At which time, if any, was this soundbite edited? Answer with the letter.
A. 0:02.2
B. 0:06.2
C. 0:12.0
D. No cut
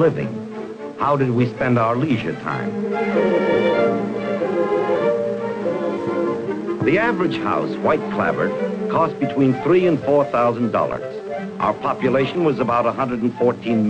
B